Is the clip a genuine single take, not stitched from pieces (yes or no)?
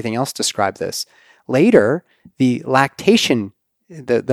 yes